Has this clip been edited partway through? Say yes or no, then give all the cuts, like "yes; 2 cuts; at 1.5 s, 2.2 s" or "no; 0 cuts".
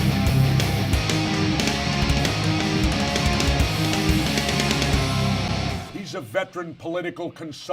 yes; 1 cut; at 6.7 s